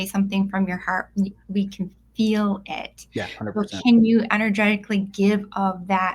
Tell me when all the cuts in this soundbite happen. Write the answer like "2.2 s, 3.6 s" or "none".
none

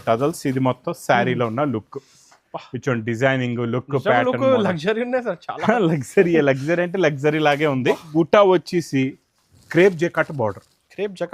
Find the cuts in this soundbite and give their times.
8.1 s

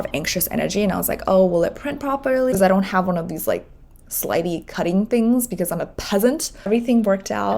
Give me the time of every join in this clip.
2.5 s, 6.7 s

